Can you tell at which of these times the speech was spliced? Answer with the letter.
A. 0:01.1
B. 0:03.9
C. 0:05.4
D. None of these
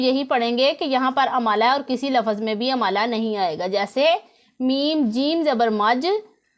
D